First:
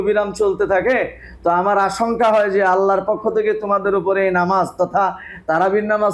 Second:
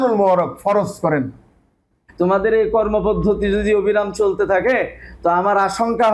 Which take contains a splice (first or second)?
second